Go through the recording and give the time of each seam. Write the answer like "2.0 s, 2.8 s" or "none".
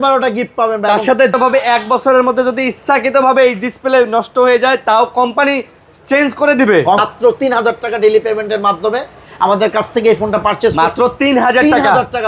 1.3 s, 7.0 s